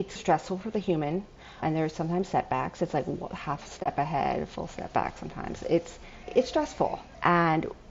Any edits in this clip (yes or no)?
no